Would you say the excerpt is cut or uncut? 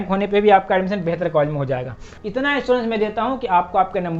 cut